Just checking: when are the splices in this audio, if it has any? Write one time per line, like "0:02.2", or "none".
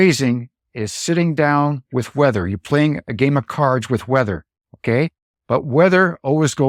none

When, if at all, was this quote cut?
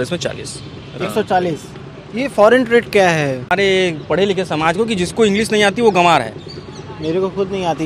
0:03.5

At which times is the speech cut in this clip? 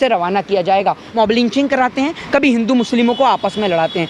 0:01.1

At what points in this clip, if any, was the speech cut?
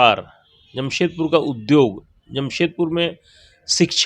none

